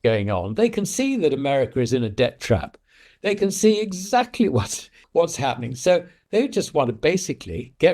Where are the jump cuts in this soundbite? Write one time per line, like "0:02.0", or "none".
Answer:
0:04.9